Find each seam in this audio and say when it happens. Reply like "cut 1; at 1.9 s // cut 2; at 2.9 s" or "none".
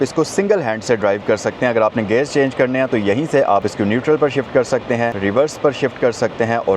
cut 1; at 3.6 s // cut 2; at 5.2 s